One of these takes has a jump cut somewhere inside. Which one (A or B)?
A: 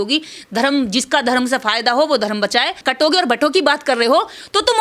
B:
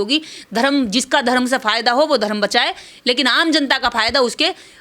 A